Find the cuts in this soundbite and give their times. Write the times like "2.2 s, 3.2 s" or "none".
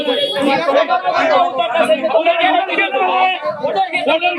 none